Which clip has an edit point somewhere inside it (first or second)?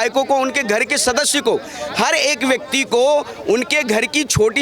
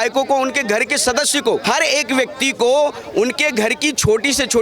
second